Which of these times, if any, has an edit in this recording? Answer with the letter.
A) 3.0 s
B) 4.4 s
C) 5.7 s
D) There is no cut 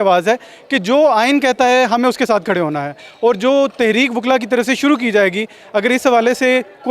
D